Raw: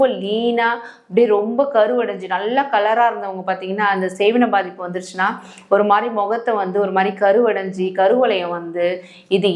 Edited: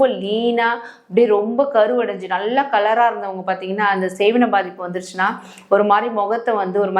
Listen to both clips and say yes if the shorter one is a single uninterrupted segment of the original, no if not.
yes